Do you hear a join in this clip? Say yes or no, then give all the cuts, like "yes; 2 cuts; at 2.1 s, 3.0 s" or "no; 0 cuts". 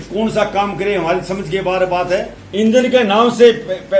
yes; 1 cut; at 2.4 s